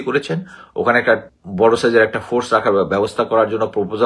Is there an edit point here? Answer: yes; 1 cut; at 1.3 s

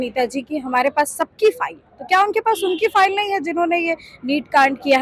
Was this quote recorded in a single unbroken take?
yes; 0 cuts

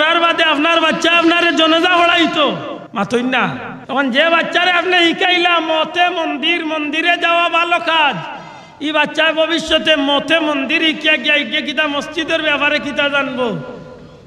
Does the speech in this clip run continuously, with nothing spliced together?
no; 2 cuts; at 2.8 s, 3.7 s

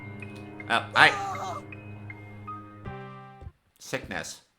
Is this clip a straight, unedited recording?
no; 1 cut; at 3.2 s

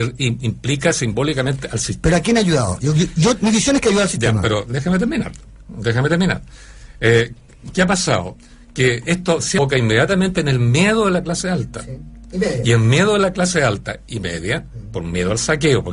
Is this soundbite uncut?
yes; 0 cuts

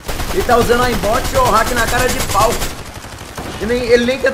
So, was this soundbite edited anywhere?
no; 0 cuts

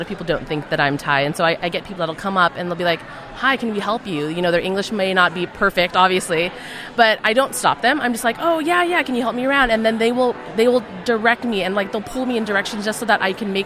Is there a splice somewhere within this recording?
yes; 1 cut; at 1.6 s

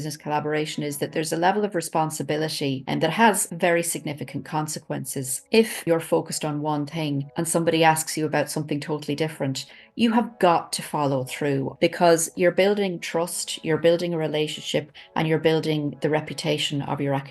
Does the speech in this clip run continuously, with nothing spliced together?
no; 4 cuts; at 2.8 s, 5.8 s, 7.3 s, 11.7 s

